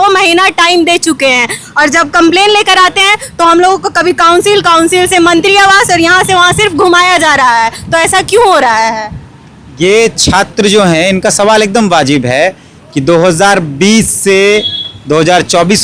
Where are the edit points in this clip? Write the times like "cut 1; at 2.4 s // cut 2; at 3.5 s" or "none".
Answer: none